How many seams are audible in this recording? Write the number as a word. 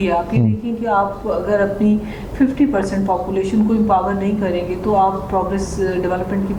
zero